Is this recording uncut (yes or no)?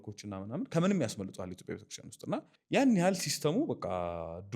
no